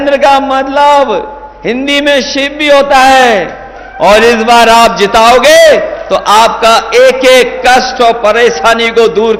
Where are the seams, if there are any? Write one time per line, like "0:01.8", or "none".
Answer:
none